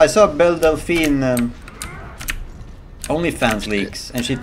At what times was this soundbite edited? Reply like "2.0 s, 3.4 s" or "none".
none

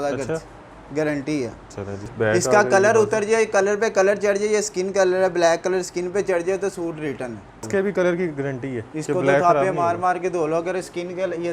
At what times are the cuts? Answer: 2.1 s, 7.7 s

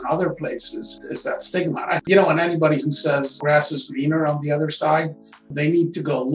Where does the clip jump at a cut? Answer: 1.0 s, 2.0 s, 3.3 s

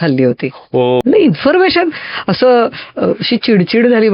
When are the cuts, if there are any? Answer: 1.0 s

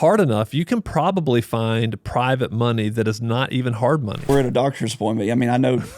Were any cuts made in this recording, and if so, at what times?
4.3 s

